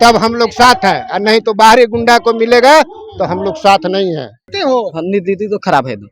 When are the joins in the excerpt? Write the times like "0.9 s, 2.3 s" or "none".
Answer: 4.5 s